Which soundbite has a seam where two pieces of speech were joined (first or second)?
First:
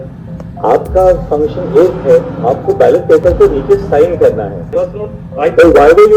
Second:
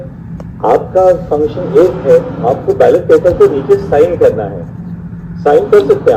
first